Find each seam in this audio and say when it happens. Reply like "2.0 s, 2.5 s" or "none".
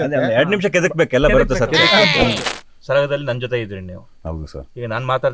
2.4 s